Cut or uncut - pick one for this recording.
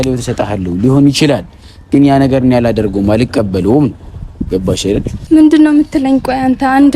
cut